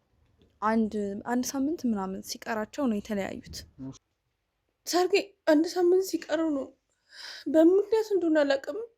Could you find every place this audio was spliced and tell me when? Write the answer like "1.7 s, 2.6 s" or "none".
4.0 s